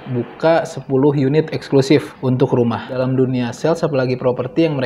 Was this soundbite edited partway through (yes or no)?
yes